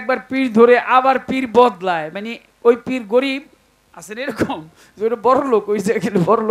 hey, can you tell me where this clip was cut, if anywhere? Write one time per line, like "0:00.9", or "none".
none